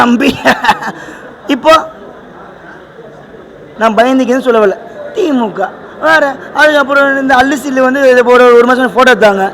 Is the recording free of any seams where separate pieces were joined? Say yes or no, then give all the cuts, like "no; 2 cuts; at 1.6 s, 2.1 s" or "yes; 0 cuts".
no; 1 cut; at 3.7 s